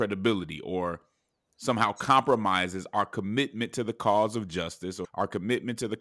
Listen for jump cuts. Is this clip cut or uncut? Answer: cut